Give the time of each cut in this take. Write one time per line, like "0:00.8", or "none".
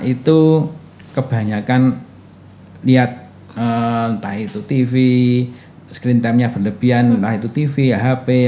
none